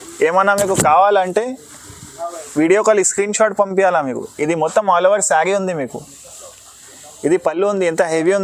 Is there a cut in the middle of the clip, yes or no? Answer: no